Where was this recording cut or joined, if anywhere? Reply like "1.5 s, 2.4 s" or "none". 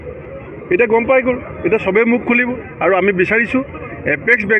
none